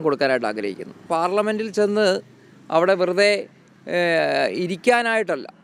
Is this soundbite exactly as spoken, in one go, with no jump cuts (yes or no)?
no